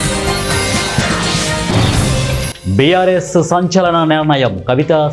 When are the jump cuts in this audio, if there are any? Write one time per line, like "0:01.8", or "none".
0:02.5